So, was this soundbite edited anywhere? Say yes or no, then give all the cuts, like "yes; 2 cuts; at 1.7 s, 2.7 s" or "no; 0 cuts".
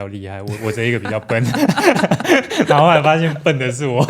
no; 0 cuts